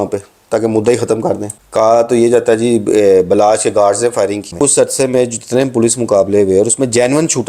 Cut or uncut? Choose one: cut